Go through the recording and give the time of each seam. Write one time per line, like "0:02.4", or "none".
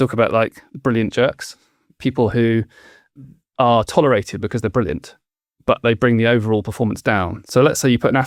none